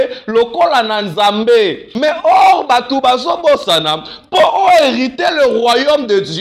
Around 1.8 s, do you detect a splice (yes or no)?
yes